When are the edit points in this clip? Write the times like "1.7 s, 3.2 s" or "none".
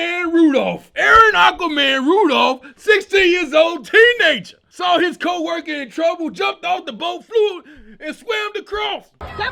none

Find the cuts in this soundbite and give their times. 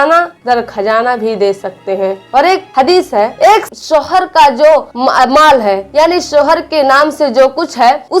3.7 s

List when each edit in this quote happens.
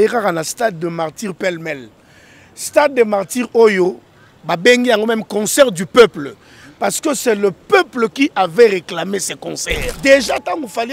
9.9 s

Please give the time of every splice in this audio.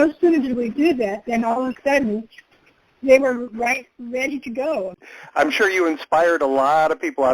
5.0 s

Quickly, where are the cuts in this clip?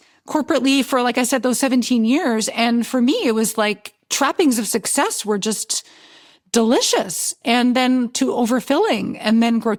none

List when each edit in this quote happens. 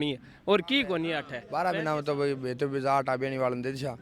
1.3 s

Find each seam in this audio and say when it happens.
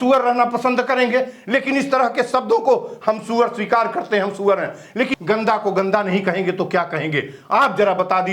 5.1 s

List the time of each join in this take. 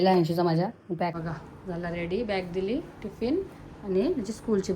1.2 s

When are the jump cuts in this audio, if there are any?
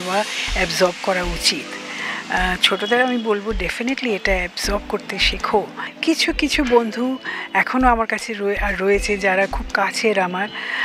5.8 s

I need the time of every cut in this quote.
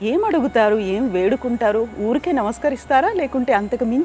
none

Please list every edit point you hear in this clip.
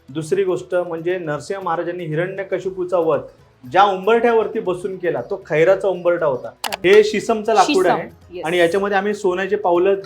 6.7 s

